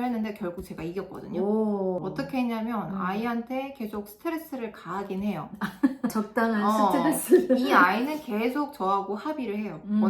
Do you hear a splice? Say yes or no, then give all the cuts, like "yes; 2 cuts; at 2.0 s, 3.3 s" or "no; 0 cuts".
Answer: no; 0 cuts